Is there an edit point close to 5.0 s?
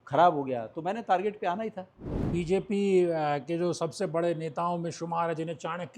no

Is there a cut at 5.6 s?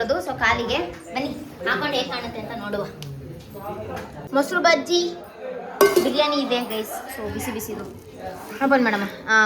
no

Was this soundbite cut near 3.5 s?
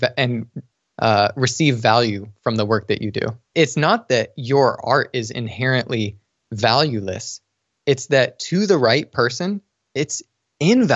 yes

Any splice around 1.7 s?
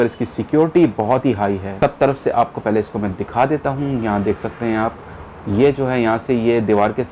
no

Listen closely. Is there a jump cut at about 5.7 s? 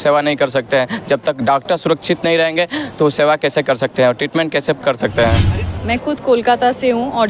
yes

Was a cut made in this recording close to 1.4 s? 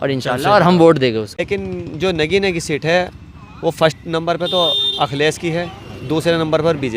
yes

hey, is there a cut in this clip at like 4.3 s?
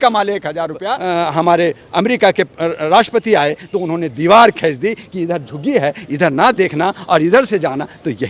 no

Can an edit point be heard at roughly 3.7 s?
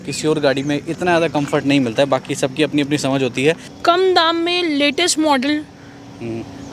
yes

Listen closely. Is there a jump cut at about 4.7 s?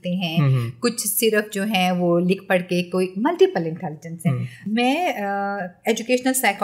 yes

